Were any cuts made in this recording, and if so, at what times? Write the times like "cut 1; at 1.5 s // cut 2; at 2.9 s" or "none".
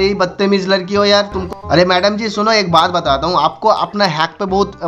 cut 1; at 1.4 s